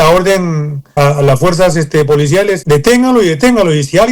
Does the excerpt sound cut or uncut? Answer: cut